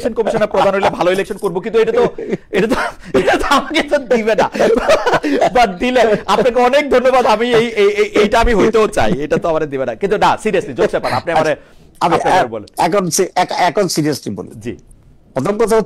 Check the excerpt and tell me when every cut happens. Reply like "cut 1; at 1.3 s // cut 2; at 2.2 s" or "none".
none